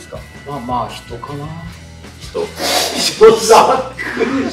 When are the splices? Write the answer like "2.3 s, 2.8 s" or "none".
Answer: none